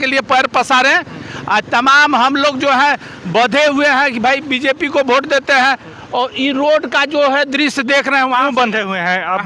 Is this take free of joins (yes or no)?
yes